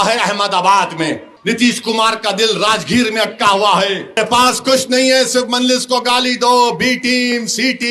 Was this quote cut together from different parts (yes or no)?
yes